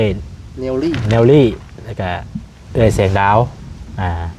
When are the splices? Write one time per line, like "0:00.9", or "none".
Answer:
none